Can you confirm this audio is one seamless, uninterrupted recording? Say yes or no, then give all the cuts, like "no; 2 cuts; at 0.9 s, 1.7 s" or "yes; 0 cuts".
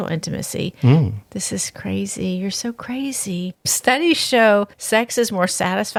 yes; 0 cuts